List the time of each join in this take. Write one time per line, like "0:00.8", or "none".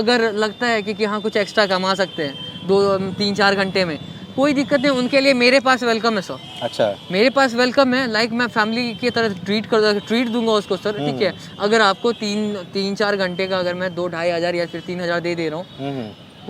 none